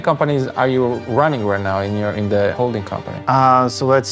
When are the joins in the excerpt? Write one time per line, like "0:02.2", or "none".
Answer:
0:03.1